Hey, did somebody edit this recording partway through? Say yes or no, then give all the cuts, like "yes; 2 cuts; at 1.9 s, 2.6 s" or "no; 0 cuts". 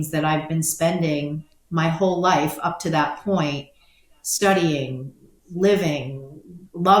no; 0 cuts